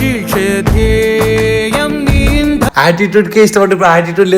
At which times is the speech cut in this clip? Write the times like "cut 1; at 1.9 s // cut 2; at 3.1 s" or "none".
cut 1; at 2.7 s